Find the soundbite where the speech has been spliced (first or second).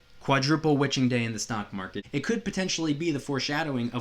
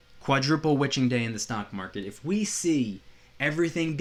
first